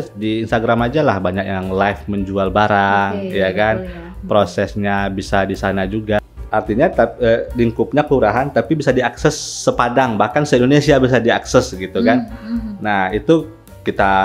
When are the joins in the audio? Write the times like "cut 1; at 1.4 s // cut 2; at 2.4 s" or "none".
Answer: cut 1; at 6.2 s